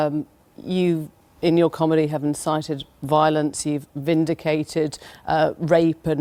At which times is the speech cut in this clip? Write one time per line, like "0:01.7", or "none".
none